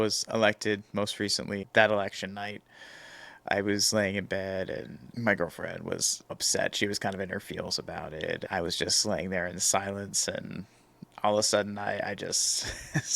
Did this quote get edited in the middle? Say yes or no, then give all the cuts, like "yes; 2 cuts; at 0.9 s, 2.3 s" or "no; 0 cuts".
yes; 3 cuts; at 1.6 s, 6.3 s, 8.4 s